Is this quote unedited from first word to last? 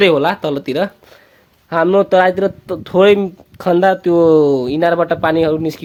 yes; 0 cuts

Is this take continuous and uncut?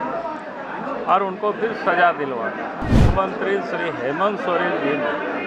no; 1 cut; at 3.0 s

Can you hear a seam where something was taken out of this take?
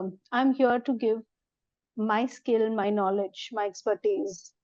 no; 0 cuts

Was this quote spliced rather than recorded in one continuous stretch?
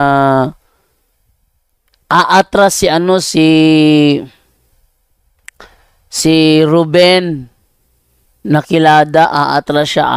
no; 0 cuts

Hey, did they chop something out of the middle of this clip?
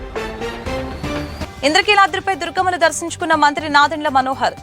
yes; 1 cut; at 1.4 s

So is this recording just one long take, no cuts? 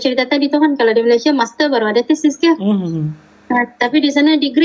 yes; 0 cuts

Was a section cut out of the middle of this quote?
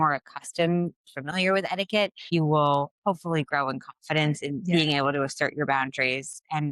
yes; 1 cut; at 2.2 s

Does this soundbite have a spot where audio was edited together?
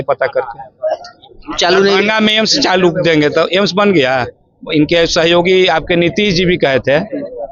no; 0 cuts

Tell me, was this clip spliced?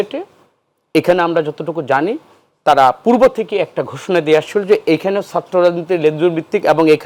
no; 0 cuts

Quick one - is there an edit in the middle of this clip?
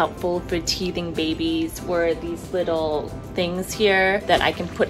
no; 0 cuts

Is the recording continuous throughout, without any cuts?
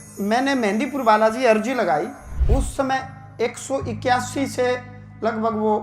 no; 1 cut; at 2.3 s

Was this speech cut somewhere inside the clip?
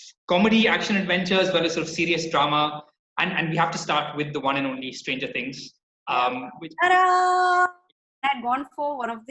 yes; 1 cut; at 8.1 s

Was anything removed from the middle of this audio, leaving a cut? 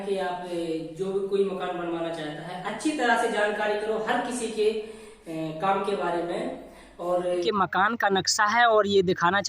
yes; 1 cut; at 7.4 s

